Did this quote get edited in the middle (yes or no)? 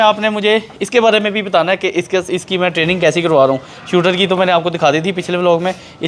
no